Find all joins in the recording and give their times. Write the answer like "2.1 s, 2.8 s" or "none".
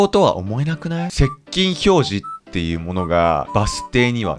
1.1 s, 3.5 s